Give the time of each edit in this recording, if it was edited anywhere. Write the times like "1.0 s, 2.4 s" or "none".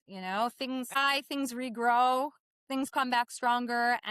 0.9 s